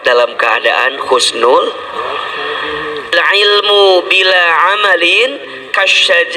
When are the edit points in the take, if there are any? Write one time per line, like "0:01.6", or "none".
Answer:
0:03.1